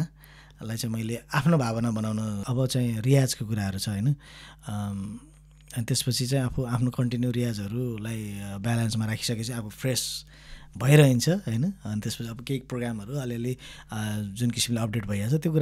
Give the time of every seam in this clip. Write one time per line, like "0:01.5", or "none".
0:02.4